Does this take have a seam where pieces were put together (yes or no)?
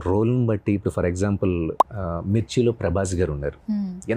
no